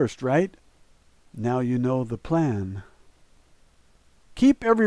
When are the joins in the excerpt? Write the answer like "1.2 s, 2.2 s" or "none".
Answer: none